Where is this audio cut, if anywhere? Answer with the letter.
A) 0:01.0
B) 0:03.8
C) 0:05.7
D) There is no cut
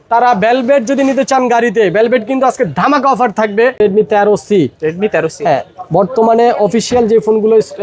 B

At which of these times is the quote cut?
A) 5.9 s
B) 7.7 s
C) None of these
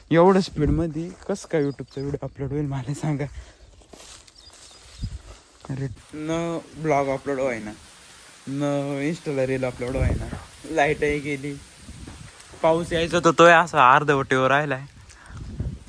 A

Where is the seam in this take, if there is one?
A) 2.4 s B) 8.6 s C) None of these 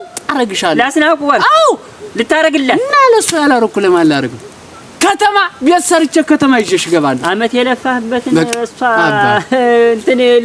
C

